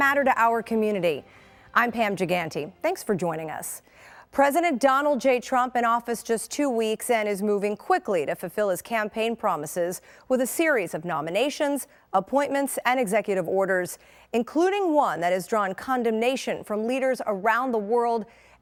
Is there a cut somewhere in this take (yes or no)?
no